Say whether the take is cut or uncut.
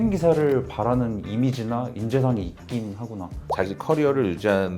cut